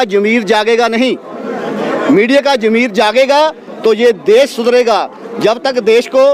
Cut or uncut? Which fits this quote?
uncut